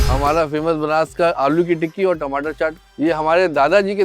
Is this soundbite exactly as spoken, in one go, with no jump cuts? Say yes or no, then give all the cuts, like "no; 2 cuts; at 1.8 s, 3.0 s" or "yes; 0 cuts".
no; 1 cut; at 2.8 s